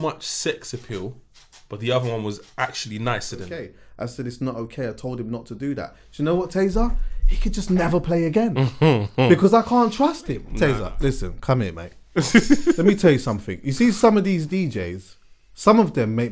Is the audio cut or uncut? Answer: cut